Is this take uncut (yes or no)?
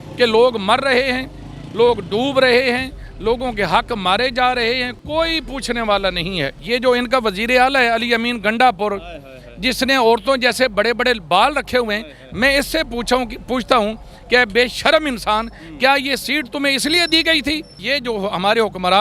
no